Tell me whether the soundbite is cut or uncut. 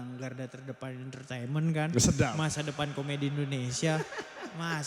uncut